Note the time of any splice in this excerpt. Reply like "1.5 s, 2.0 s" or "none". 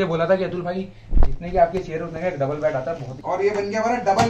3.1 s